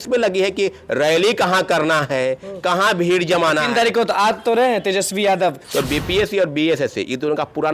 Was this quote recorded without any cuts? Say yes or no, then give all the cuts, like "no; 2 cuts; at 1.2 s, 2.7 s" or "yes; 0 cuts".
no; 1 cut; at 5.6 s